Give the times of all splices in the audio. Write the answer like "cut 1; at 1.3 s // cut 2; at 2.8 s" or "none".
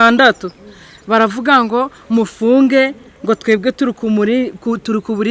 none